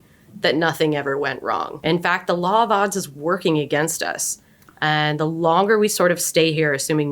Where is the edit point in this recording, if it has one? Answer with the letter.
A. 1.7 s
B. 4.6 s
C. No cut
A